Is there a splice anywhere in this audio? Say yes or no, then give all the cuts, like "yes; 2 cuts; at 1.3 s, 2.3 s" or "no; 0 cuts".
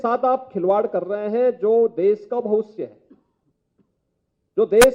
no; 0 cuts